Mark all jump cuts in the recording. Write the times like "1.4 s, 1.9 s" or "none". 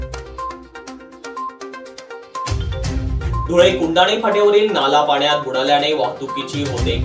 1.5 s